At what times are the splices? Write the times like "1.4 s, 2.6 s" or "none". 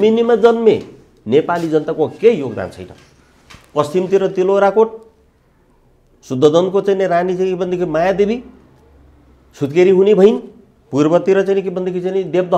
none